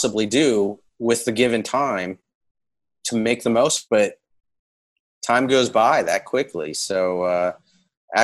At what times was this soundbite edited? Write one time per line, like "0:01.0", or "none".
0:03.8